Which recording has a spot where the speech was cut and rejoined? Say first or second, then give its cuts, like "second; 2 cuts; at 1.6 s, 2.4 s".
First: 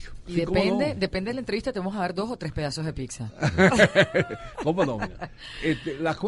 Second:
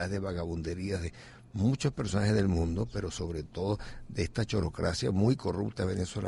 second; 1 cut; at 1.7 s